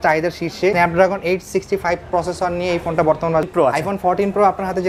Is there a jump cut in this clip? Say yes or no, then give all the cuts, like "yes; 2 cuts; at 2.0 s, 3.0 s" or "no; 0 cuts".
yes; 2 cuts; at 0.7 s, 3.4 s